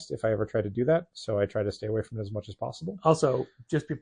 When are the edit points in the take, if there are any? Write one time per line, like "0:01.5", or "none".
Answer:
none